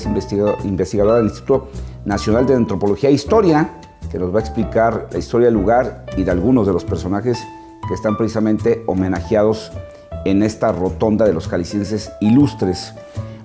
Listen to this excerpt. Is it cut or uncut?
cut